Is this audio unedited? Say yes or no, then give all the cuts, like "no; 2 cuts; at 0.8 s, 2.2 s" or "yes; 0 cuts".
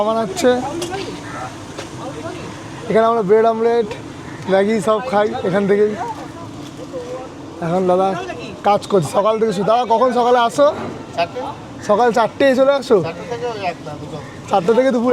yes; 0 cuts